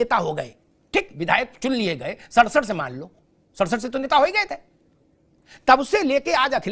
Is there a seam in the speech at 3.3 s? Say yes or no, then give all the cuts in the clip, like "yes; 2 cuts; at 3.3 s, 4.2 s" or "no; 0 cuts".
no; 0 cuts